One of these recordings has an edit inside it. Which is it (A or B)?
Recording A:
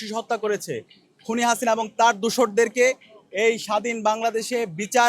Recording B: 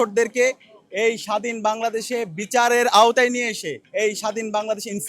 B